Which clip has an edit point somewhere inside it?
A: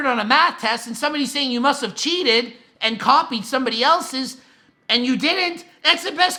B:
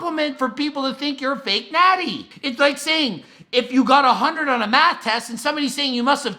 B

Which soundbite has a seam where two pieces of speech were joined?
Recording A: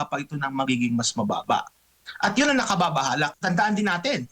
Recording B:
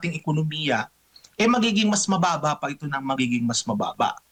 A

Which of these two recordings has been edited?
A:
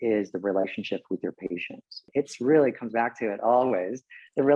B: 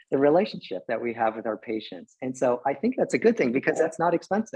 A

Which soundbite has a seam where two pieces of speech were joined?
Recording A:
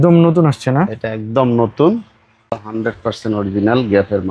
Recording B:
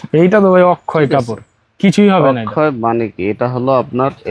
A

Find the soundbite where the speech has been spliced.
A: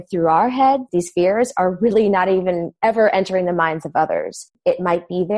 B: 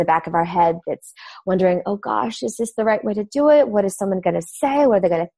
A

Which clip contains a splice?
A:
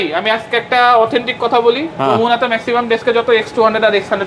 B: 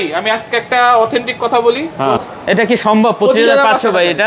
B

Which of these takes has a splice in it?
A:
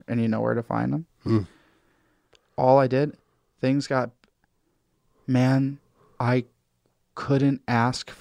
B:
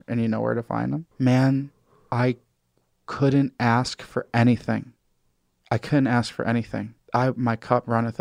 B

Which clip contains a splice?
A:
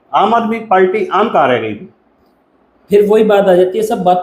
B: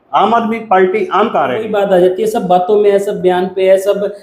B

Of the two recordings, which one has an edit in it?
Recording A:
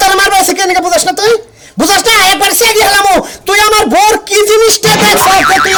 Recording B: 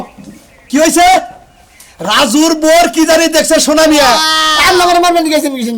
B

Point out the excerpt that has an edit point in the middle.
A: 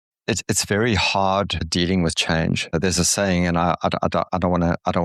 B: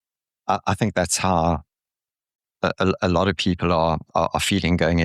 A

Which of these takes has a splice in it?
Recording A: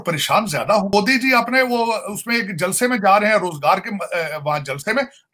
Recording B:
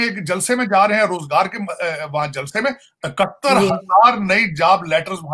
A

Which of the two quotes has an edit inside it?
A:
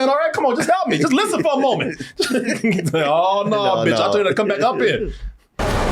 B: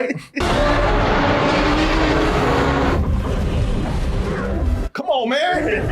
B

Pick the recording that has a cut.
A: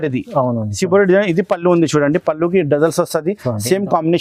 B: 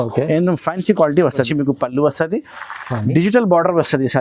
B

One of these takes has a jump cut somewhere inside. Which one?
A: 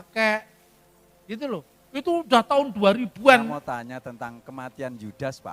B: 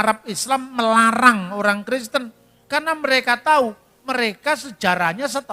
A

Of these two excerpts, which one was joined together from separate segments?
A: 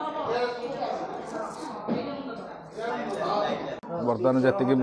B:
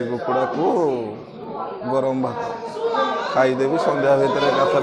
A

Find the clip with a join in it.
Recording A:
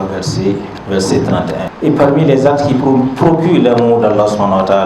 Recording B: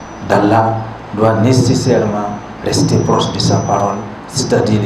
A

